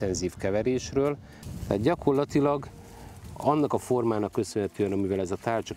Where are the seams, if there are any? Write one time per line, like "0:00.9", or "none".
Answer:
0:01.3